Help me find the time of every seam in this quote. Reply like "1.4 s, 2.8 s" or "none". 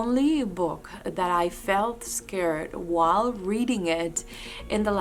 none